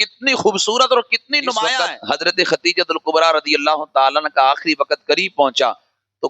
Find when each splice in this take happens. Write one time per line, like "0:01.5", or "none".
0:01.7